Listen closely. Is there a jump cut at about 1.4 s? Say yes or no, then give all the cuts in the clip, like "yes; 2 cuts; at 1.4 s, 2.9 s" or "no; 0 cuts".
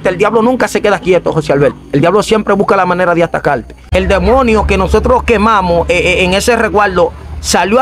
no; 1 cut; at 3.8 s